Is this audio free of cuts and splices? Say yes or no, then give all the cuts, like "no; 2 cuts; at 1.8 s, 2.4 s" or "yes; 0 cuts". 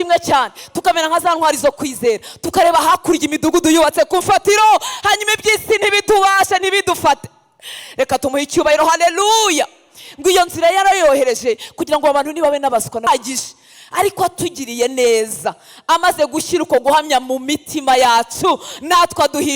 no; 1 cut; at 13.1 s